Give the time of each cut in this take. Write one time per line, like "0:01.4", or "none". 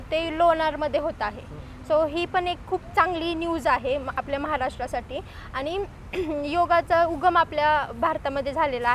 none